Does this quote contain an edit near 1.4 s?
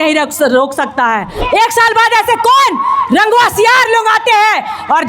yes; 1 cut; at 1.4 s

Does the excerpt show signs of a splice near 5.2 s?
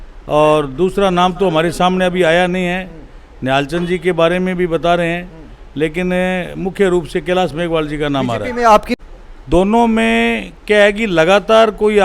no; 1 cut; at 9.0 s

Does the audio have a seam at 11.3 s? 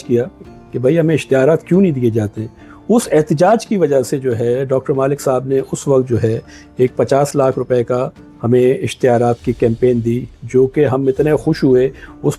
no; 0 cuts

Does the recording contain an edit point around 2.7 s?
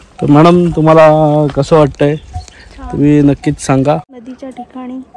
no; 1 cut; at 4.2 s

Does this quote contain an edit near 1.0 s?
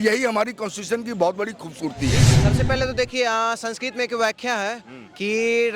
no; 1 cut; at 2.3 s

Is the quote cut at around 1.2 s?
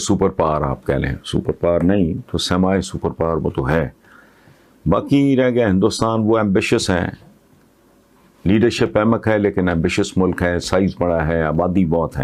no; 0 cuts

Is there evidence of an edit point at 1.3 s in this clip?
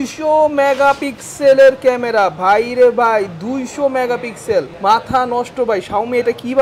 no; 1 cut; at 4.7 s

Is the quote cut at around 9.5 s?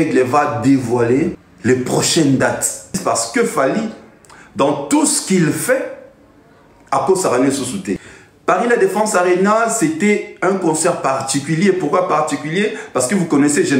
no; 3 cuts; at 1.5 s, 3.0 s, 8.0 s

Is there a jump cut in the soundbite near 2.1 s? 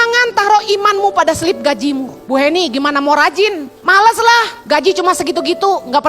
yes; 3 cuts; at 2.1 s, 3.7 s, 4.5 s

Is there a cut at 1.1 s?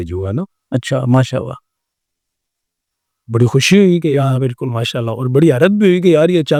no; 0 cuts

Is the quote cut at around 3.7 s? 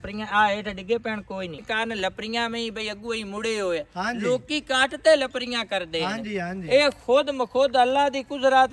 no; 1 cut; at 1.6 s

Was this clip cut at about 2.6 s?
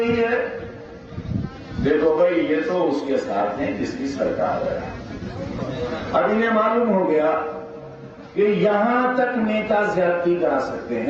no; 0 cuts

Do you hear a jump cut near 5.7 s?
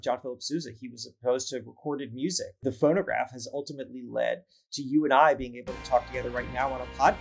no; 1 cut; at 2.6 s

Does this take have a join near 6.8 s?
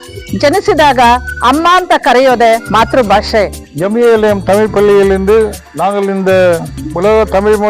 yes; 2 cuts; at 3.6 s, 6.8 s

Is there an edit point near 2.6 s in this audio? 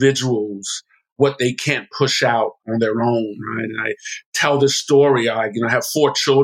yes; 2 cuts; at 1.2 s, 2.6 s

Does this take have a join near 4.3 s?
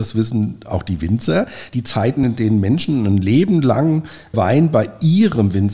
yes; 1 cut; at 4.3 s

